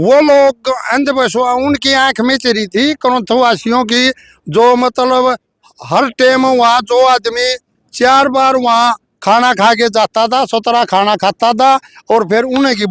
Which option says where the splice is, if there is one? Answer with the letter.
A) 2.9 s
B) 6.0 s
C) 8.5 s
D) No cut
D